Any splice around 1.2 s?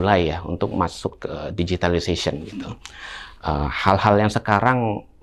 no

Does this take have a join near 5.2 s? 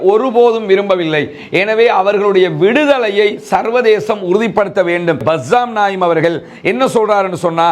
yes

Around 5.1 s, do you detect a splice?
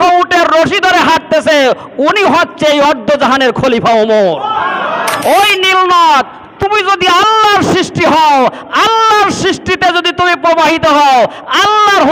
yes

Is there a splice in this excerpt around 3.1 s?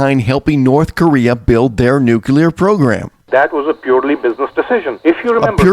yes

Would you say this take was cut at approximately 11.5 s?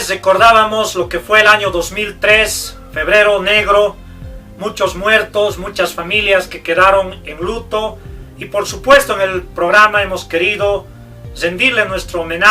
no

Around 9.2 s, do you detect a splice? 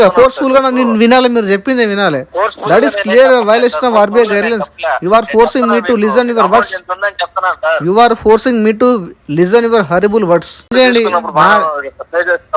no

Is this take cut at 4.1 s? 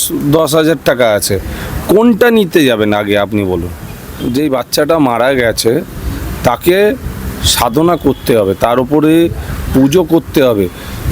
yes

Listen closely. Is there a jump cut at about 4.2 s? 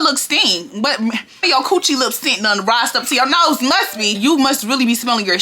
yes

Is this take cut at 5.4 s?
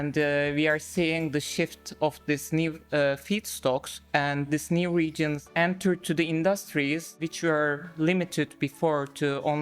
yes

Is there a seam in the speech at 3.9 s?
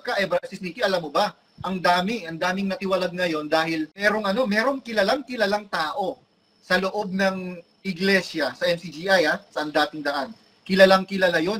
yes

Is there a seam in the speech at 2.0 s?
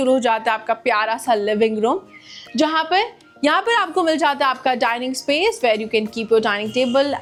no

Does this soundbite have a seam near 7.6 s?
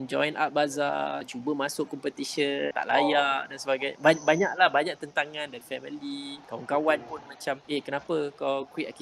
yes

